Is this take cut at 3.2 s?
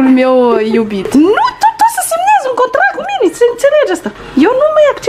yes; 3 cuts; at 1.1 s, 3.2 s, 4.1 s

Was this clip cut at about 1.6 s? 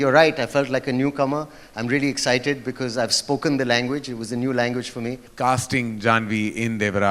no; 1 cut; at 5.3 s

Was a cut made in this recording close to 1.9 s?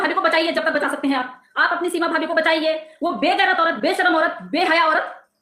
no; 0 cuts

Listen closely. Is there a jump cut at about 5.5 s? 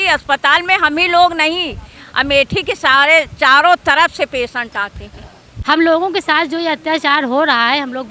yes; 1 cut; at 5.5 s

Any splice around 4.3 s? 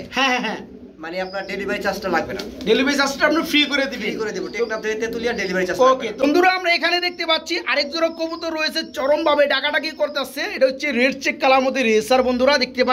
no; 0 cuts

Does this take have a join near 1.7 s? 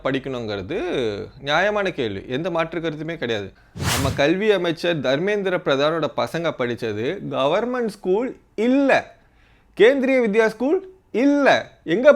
no; 1 cut; at 3.5 s

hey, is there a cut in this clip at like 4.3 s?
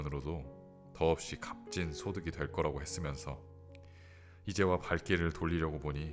no; 0 cuts

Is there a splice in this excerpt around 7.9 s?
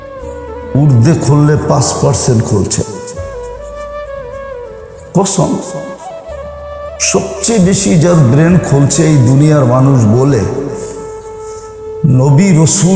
no; 2 cuts; at 10.7 s, 12.0 s

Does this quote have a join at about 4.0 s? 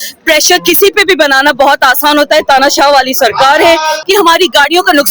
yes; 1 cut; at 4.0 s

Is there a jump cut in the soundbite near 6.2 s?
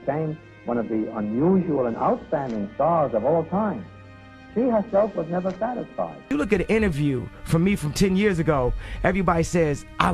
yes; 1 cut; at 6.2 s

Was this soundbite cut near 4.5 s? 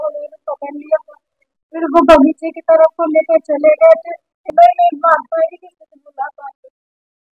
yes; 1 cut; at 4.5 s

